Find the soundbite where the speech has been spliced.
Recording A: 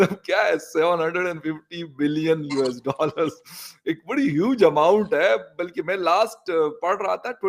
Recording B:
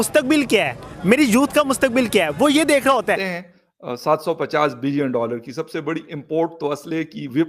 B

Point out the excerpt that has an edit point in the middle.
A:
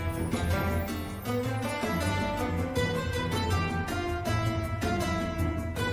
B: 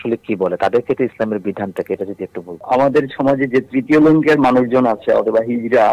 B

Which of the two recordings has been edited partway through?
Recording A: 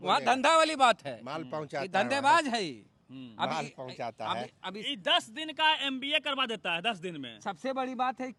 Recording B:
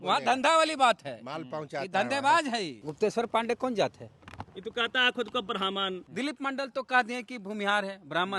B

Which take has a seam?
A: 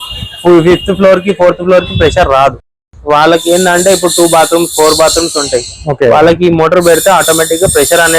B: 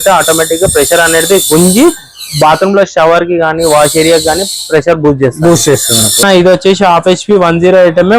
B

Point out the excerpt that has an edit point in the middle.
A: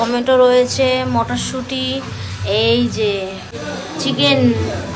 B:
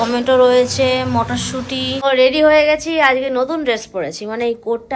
B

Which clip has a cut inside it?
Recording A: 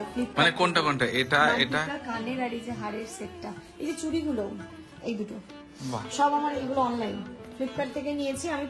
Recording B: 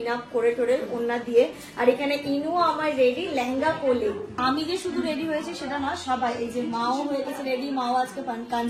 B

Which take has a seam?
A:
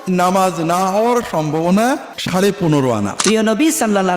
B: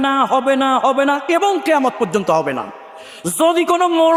A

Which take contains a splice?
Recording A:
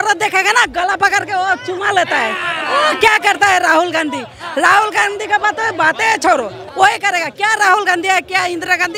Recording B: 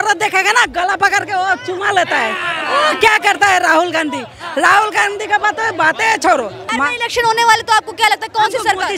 B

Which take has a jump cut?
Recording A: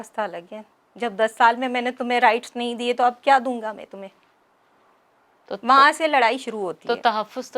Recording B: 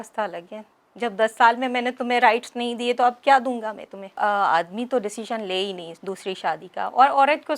B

